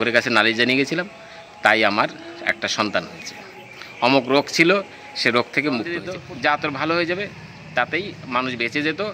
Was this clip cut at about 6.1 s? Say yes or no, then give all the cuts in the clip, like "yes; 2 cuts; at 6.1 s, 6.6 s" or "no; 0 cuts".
yes; 1 cut; at 6.1 s